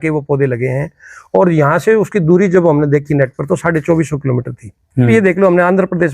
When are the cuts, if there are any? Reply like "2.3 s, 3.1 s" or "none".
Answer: 5.1 s